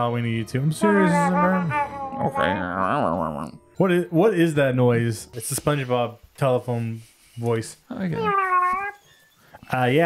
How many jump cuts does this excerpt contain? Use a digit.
2